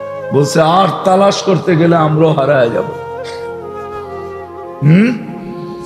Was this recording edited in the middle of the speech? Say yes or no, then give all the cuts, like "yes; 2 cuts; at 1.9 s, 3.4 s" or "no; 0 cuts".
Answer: yes; 2 cuts; at 3.3 s, 4.8 s